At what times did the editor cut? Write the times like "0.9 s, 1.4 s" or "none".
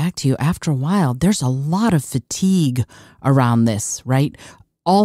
none